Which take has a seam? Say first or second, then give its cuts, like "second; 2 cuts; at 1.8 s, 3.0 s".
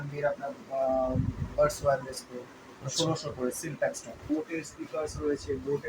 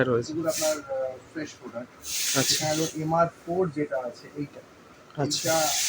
first; 1 cut; at 4.2 s